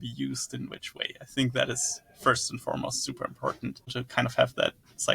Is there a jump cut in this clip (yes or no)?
yes